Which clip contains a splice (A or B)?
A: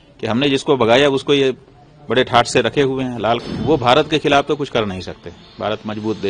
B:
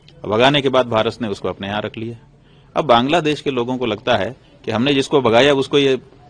A